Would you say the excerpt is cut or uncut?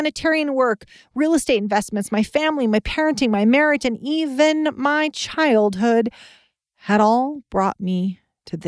uncut